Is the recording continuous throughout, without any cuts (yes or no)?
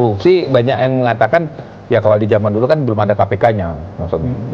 yes